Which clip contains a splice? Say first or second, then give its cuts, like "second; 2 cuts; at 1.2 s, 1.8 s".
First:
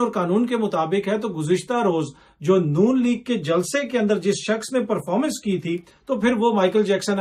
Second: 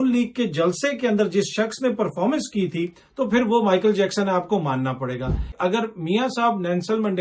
second; 1 cut; at 5.4 s